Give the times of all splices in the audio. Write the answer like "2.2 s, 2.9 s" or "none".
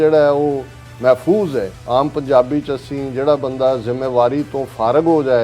1.8 s